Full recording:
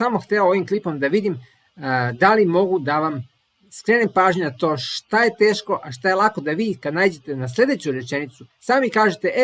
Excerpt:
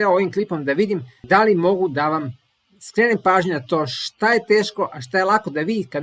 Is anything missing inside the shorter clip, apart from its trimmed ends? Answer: yes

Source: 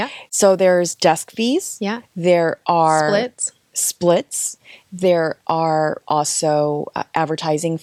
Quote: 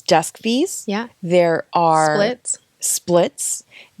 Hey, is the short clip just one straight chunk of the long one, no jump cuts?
yes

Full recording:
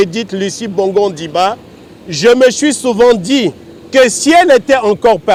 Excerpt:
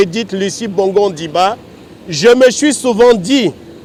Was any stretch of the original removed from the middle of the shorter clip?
no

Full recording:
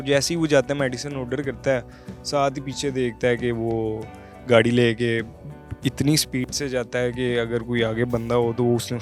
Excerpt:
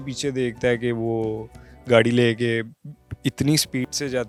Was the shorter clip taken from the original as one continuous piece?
yes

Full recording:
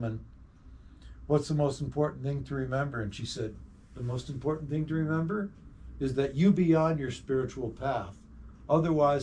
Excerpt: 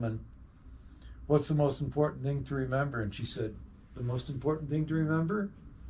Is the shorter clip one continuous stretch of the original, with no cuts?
yes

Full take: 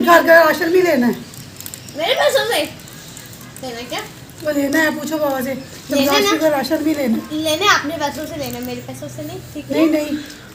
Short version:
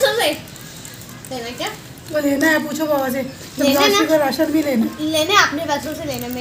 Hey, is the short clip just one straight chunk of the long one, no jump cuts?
yes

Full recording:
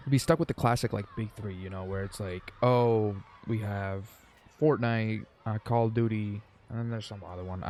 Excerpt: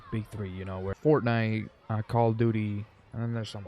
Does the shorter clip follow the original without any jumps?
no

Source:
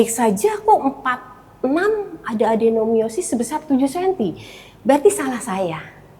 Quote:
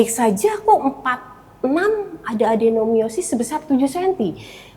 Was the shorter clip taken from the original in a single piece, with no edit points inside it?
yes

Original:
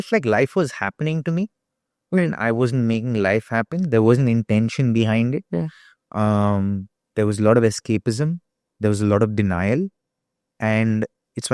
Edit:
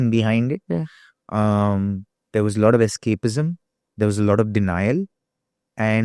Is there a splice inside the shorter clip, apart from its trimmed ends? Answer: no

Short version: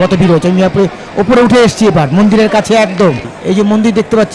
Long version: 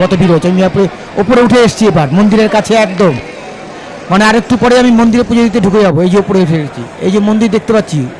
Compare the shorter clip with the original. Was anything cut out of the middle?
yes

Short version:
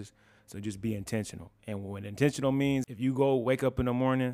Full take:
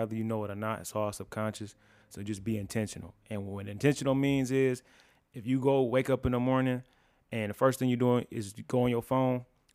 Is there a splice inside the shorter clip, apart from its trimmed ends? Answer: yes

